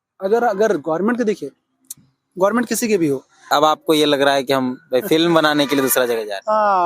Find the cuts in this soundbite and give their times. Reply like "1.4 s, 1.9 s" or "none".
3.3 s